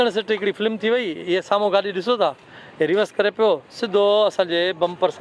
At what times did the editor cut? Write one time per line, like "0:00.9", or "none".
none